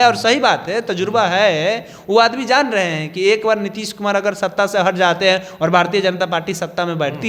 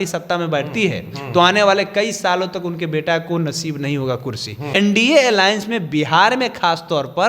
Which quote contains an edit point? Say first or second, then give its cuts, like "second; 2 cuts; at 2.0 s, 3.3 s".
second; 1 cut; at 4.6 s